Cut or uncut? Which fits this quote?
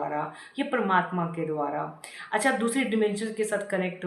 uncut